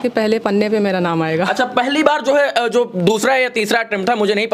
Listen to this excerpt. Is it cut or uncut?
uncut